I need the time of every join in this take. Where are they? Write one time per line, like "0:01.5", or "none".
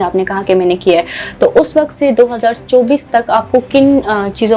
none